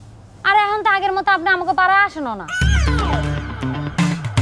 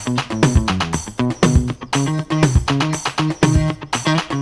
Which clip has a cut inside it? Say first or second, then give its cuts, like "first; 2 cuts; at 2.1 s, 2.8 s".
first; 1 cut; at 2.7 s